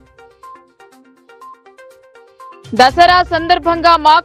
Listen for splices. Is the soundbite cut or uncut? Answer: cut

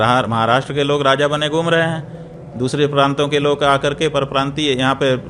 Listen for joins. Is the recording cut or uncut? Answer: uncut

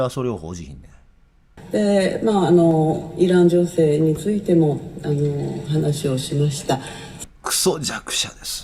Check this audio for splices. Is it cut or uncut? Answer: cut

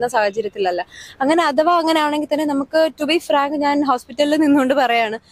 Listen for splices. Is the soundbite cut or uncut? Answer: uncut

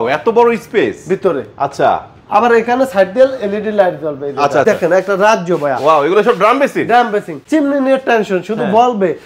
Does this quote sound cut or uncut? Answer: cut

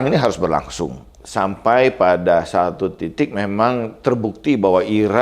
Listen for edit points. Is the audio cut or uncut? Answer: uncut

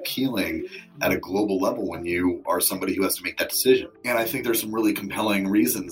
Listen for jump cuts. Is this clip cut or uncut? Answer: uncut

